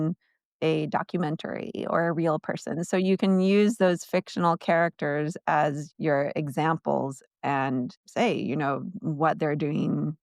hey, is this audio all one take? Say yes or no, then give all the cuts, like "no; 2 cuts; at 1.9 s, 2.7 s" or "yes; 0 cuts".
no; 2 cuts; at 5.8 s, 8.0 s